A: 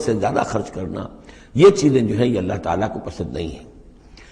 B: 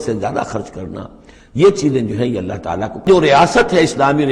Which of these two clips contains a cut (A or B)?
B